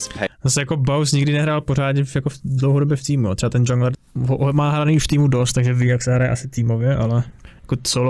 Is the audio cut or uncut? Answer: uncut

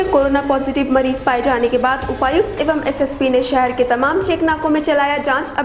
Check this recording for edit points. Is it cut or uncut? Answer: uncut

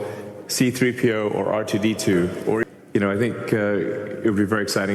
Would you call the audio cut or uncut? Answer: cut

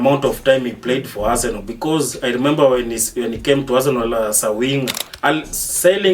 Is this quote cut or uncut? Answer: cut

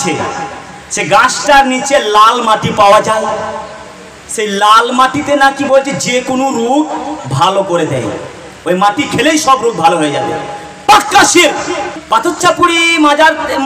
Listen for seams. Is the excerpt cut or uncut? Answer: cut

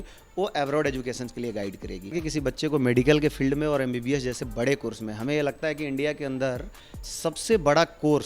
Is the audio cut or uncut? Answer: cut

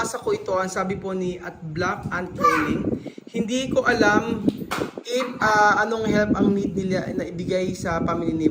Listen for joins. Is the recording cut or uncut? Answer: uncut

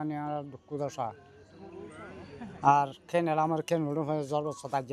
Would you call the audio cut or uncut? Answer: uncut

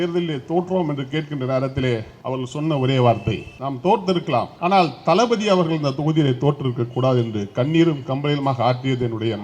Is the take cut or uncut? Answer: cut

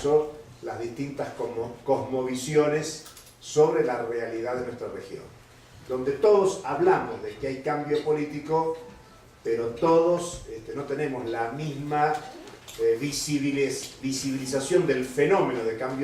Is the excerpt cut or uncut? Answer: cut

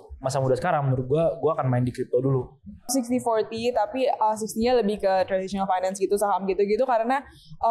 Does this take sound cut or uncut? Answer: cut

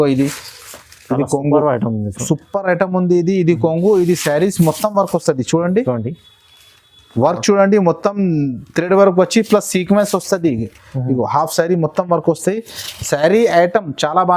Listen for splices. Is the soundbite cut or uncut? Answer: uncut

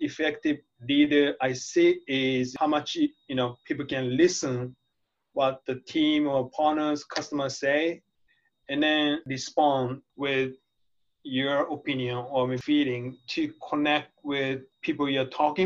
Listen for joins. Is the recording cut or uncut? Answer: cut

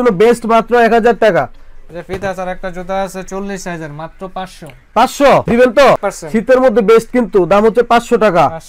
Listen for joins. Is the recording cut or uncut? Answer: uncut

